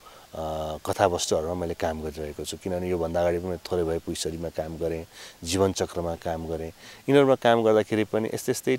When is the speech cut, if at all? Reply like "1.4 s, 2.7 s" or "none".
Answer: none